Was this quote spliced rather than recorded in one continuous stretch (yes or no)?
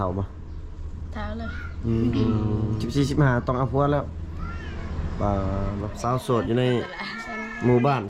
yes